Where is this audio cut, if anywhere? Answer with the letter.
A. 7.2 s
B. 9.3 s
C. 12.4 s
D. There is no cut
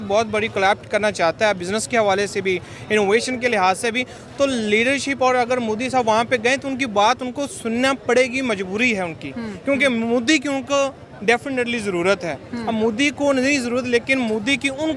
D